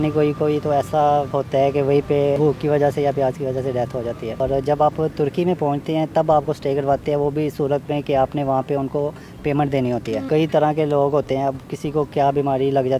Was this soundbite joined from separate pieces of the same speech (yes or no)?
yes